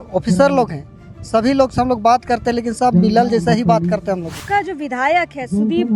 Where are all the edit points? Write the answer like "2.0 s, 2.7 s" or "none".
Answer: 4.4 s